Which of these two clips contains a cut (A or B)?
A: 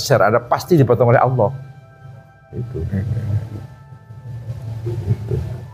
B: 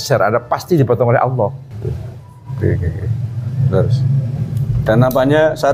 B